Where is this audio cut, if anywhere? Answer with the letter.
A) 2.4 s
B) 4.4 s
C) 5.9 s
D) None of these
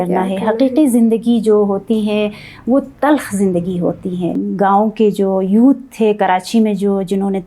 B